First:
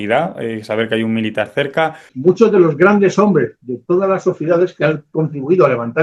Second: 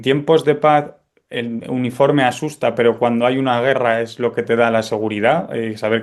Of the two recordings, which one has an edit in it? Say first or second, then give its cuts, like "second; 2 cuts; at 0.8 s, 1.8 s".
first; 1 cut; at 2.1 s